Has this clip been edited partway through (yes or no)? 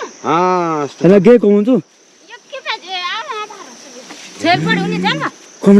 no